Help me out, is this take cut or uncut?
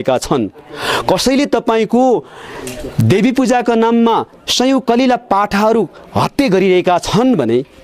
uncut